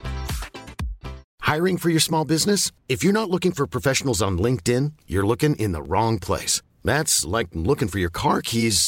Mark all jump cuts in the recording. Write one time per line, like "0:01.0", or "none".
0:01.3